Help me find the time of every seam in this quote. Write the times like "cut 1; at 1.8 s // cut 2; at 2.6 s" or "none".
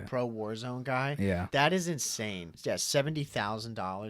cut 1; at 1.4 s // cut 2; at 2.5 s